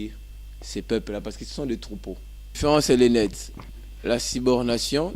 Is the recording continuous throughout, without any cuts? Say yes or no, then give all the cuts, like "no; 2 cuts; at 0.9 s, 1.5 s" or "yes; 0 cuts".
no; 1 cut; at 2.5 s